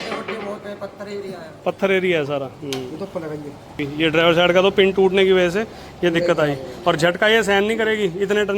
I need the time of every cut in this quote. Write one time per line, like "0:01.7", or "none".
0:03.8